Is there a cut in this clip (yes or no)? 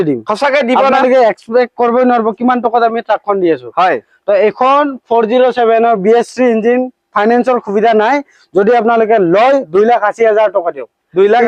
no